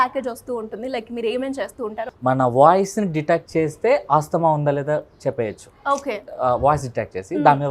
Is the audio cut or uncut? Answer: cut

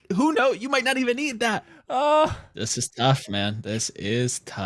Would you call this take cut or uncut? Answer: cut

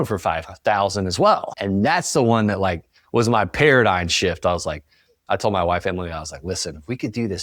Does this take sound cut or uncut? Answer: cut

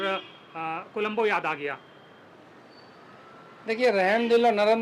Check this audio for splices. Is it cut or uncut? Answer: uncut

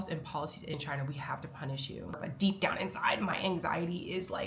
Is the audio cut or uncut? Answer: cut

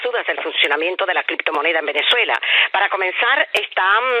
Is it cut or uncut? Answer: uncut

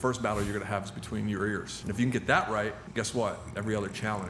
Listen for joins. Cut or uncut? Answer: cut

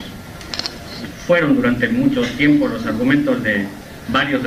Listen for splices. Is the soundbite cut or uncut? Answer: uncut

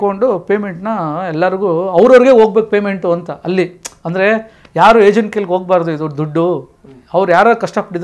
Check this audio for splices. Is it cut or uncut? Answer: uncut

